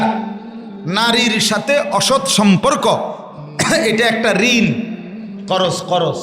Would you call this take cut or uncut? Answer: uncut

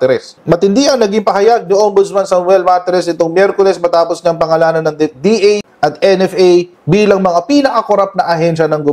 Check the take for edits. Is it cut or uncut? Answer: uncut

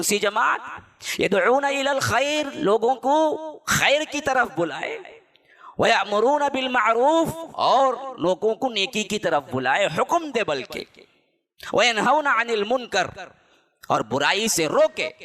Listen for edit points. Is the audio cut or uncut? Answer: uncut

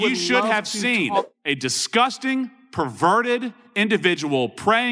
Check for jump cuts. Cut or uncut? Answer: cut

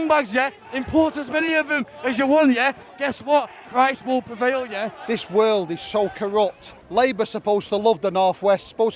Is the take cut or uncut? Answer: uncut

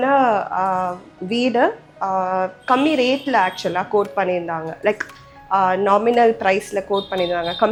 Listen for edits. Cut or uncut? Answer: uncut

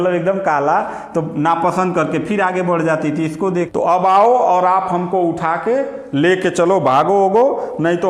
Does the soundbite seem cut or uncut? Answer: cut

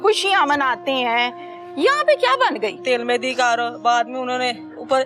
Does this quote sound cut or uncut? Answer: cut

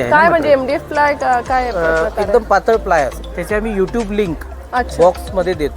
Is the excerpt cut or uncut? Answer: cut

